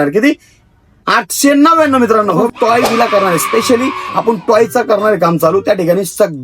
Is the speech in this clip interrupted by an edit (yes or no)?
yes